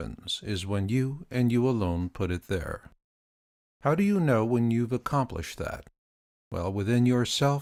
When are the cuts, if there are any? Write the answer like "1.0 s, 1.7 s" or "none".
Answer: none